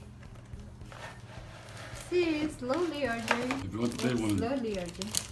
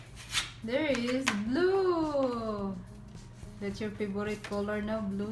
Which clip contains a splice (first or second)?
first